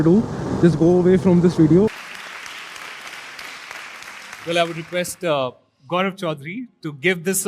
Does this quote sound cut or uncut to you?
cut